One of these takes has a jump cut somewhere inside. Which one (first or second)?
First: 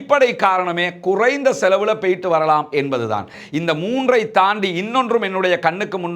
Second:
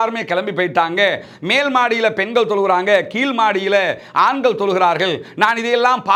first